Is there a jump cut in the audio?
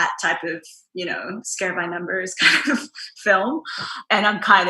yes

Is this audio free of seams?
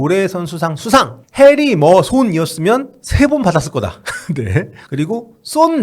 no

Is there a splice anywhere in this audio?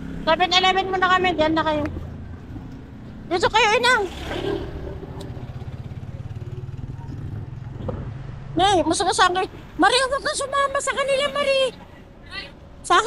no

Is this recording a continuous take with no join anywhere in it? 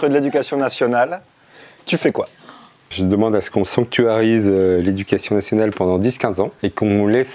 no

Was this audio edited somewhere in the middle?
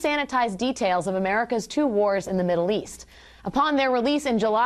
no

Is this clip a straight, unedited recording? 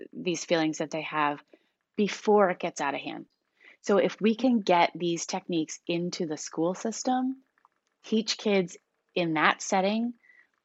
yes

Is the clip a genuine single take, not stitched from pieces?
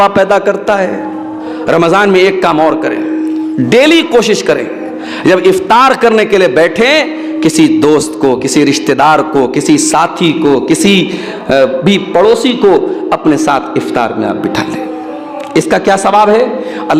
no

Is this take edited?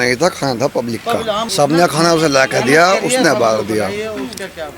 yes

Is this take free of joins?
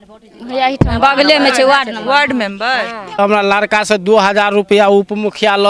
no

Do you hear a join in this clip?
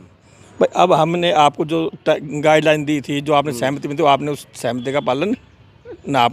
no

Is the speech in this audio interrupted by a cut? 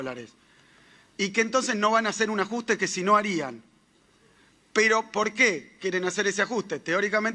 no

